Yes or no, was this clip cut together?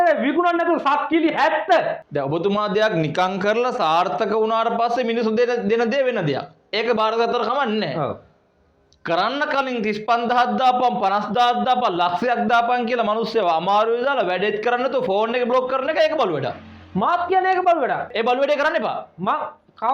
yes